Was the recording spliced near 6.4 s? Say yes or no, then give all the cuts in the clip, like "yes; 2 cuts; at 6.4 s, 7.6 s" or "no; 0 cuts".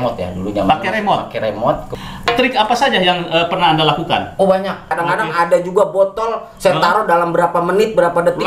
no; 2 cuts; at 1.9 s, 4.9 s